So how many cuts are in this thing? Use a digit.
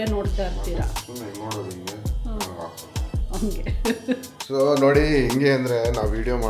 1